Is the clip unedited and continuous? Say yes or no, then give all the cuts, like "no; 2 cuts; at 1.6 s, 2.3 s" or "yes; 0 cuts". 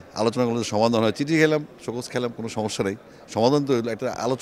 yes; 0 cuts